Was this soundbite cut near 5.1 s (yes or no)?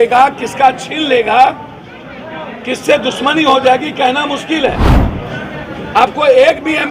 yes